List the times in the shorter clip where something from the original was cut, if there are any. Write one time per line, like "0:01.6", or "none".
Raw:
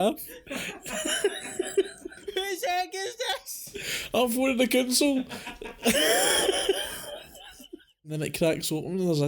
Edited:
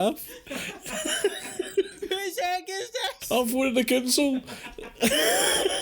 0:02.0
0:03.2